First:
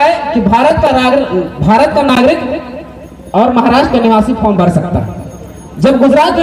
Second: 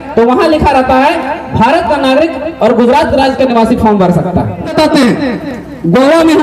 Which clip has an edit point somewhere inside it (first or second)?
second